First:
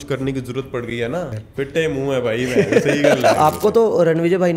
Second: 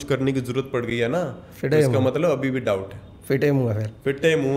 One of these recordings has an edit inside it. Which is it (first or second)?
first